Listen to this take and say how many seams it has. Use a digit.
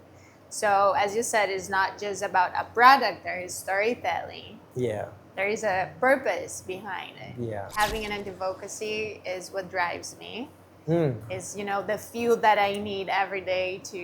1